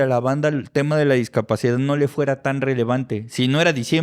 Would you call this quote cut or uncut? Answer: uncut